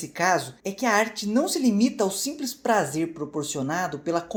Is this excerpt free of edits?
yes; 0 cuts

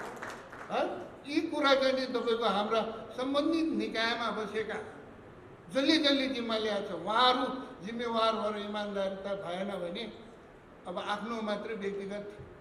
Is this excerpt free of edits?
yes; 0 cuts

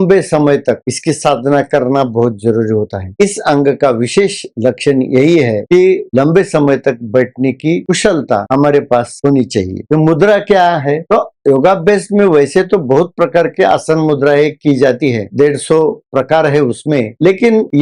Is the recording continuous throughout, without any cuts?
yes; 0 cuts

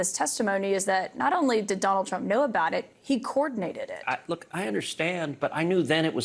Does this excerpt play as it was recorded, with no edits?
yes; 0 cuts

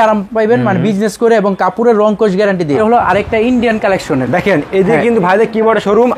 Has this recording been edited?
yes; 1 cut; at 2.8 s

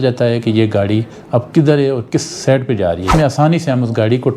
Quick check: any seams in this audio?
yes; 1 cut; at 3.1 s

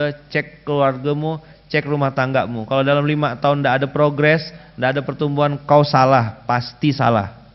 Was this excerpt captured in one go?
yes; 0 cuts

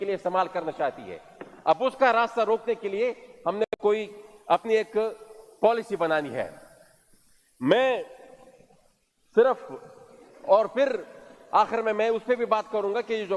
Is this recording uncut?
yes; 0 cuts

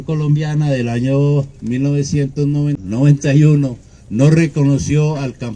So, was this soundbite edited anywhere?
yes; 1 cut; at 2.8 s

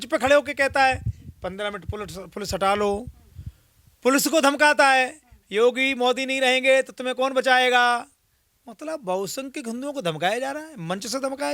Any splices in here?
no; 0 cuts

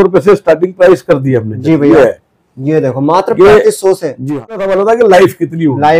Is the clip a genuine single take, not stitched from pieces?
no; 1 cut; at 4.6 s

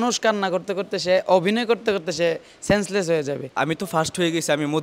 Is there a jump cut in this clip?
yes; 1 cut; at 3.6 s

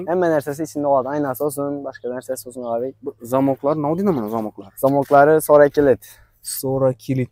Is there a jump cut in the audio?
no; 0 cuts

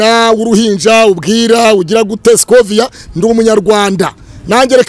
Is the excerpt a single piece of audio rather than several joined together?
yes; 0 cuts

